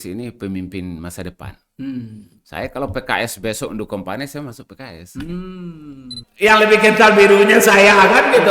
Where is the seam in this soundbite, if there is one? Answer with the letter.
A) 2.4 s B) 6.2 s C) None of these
B